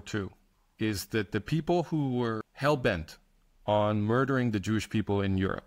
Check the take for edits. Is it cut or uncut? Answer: cut